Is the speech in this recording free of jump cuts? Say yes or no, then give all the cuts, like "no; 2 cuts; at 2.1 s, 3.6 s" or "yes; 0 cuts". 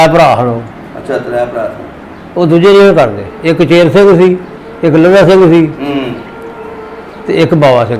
yes; 0 cuts